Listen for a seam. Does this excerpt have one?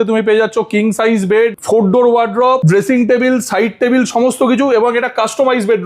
yes; 2 cuts; at 1.6 s, 2.6 s

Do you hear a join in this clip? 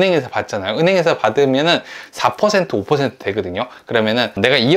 no; 0 cuts

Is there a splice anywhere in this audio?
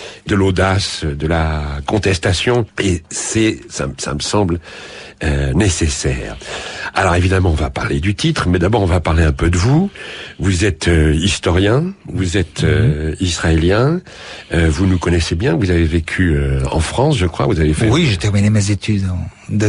yes; 1 cut; at 6.5 s

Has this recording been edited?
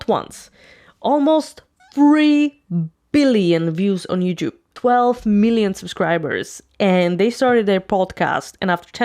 yes; 1 cut; at 4.7 s

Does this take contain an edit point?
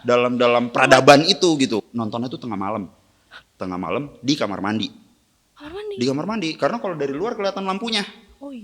yes; 1 cut; at 1.8 s

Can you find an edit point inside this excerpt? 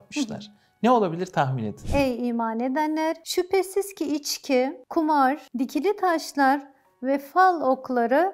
yes; 4 cuts; at 1.8 s, 3.2 s, 4.8 s, 5.5 s

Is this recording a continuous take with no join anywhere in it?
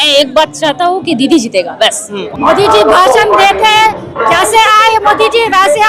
no; 1 cut; at 2.2 s

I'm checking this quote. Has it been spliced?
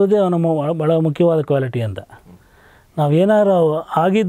no; 0 cuts

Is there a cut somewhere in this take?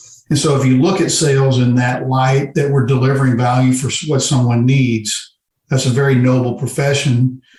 no; 0 cuts

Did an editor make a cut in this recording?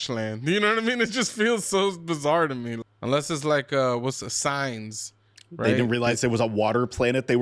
yes; 1 cut; at 2.8 s

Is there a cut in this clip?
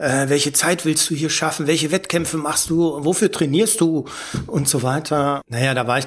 no; 0 cuts

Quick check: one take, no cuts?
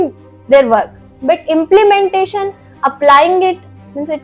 yes; 0 cuts

